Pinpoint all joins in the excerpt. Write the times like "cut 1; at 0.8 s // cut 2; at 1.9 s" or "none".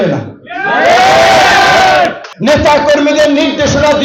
cut 1; at 2.2 s